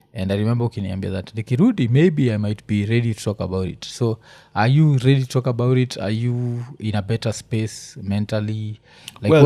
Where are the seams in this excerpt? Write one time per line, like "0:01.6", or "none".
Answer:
none

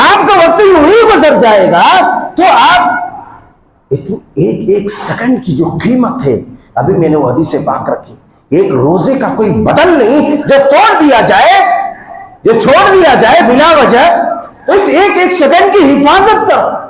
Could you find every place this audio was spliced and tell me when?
none

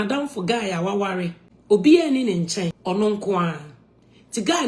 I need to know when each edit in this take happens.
0:01.5
0:02.8

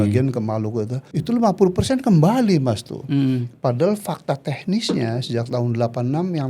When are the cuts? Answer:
0:01.0

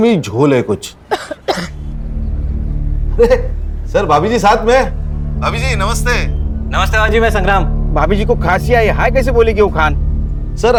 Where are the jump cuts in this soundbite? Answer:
none

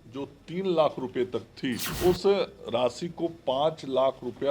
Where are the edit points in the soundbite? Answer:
0:01.9

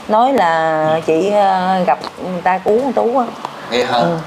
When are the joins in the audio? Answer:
none

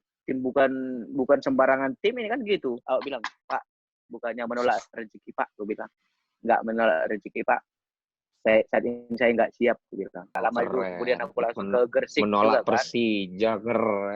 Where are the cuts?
0:02.8
0:10.4

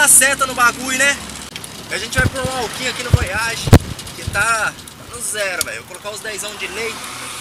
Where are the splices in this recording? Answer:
0:01.5

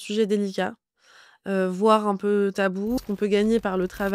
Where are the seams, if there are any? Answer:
0:03.0

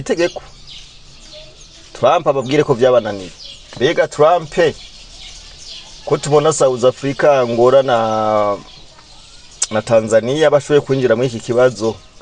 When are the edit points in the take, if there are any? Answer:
none

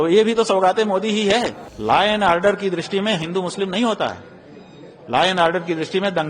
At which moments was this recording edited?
0:01.6

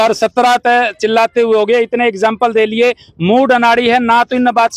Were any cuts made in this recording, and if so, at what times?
none

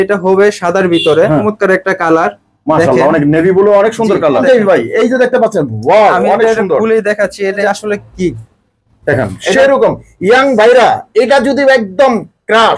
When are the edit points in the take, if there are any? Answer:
0:01.4
0:04.4
0:07.6

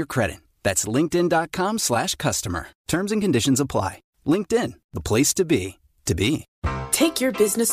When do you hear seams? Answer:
0:06.5

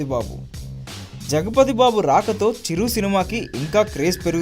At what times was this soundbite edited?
0:03.2

